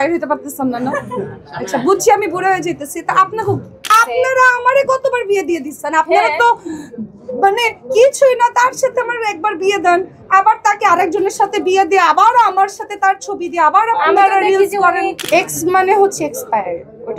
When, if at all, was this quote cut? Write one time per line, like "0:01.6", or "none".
0:04.0
0:15.2

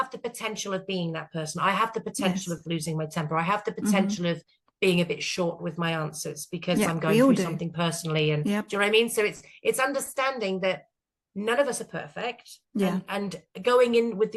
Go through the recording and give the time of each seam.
none

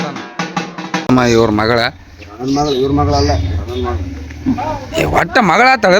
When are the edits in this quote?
0:01.1

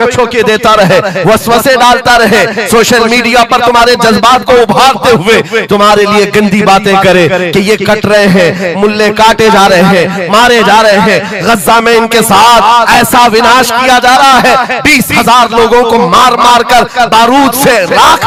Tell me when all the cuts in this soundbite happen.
none

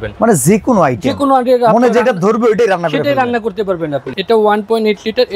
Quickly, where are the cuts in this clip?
0:04.1

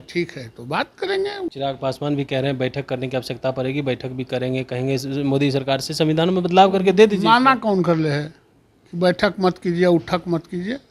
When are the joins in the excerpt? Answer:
0:01.5

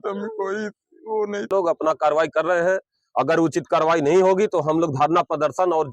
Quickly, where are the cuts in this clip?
0:01.5

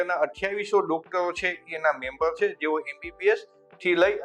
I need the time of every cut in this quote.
none

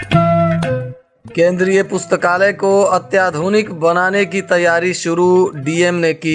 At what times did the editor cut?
0:01.1

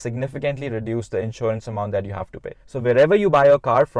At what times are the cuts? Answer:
0:02.6

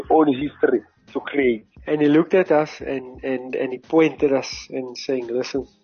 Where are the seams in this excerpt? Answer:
0:01.7

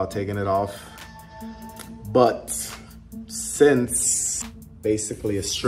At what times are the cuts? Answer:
none

